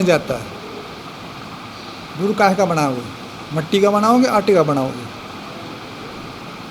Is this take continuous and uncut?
yes; 0 cuts

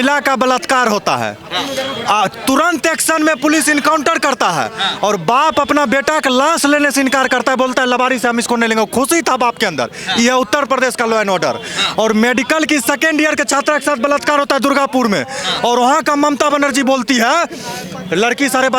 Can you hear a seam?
no; 0 cuts

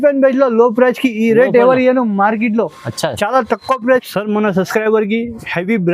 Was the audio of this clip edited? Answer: yes; 1 cut; at 3.9 s

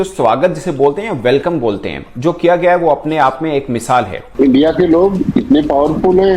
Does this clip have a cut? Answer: yes; 1 cut; at 4.3 s

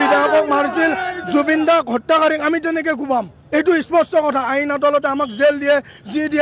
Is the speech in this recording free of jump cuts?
yes; 0 cuts

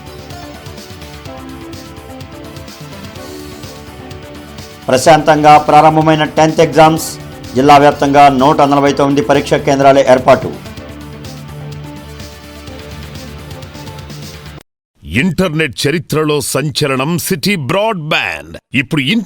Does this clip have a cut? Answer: yes; 1 cut; at 15.0 s

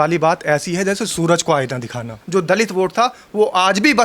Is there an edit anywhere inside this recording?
yes; 1 cut; at 2.2 s

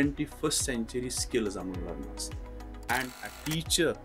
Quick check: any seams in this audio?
yes; 1 cut; at 2.9 s

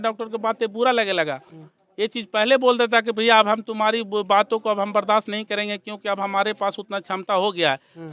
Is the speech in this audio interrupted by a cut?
no; 0 cuts

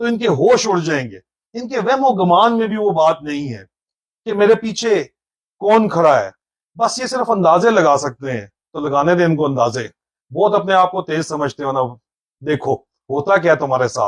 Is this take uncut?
yes; 0 cuts

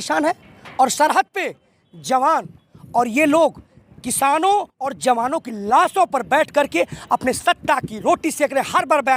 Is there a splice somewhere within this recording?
no; 0 cuts

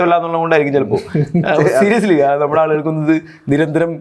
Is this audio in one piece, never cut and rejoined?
yes; 0 cuts

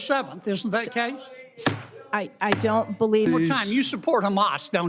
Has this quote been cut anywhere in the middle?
yes; 1 cut; at 3.3 s

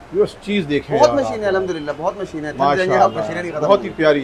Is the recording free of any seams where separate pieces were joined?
yes; 0 cuts

